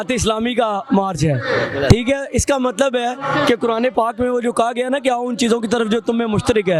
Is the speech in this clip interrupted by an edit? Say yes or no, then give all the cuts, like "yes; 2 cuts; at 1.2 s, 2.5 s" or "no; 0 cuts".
no; 0 cuts